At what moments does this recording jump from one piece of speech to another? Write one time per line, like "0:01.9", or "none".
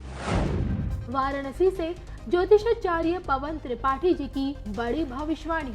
0:01.0